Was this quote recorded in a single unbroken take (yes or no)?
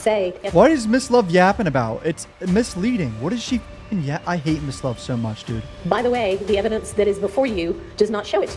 no